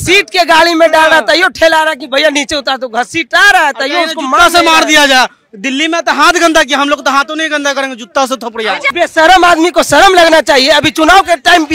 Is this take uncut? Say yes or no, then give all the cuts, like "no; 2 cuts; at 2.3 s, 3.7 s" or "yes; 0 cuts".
no; 1 cut; at 8.9 s